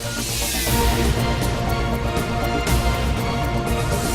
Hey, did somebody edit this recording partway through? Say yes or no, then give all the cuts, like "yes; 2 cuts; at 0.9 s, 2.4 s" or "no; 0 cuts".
no; 0 cuts